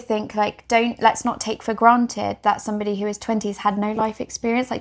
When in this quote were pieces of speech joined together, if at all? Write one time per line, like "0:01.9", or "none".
none